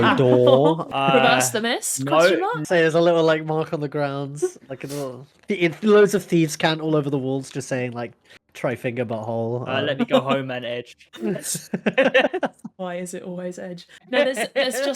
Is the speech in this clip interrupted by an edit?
yes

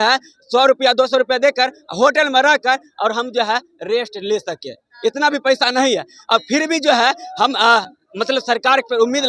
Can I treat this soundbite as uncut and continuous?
yes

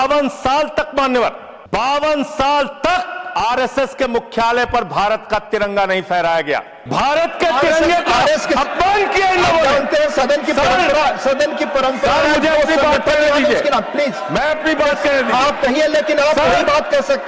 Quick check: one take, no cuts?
no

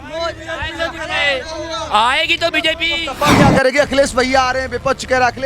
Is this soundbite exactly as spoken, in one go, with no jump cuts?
no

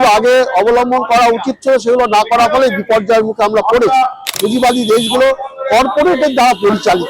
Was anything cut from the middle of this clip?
yes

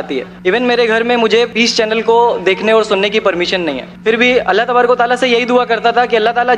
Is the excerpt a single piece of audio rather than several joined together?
no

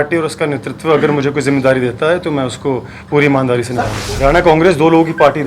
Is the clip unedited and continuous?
no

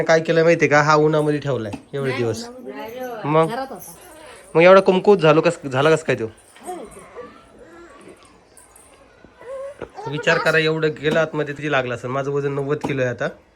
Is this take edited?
yes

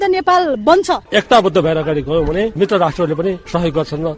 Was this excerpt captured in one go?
no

